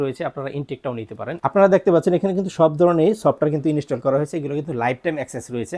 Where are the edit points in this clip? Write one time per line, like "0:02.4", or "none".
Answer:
0:01.3